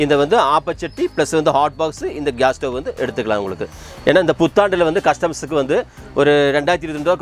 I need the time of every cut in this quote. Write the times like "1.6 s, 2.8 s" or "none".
none